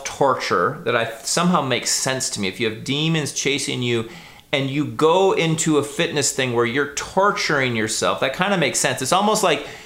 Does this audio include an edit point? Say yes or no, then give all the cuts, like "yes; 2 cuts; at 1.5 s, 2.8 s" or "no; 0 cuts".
no; 0 cuts